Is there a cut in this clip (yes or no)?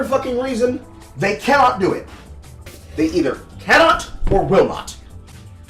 no